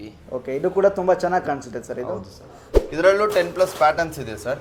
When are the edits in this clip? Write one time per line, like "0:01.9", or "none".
0:02.8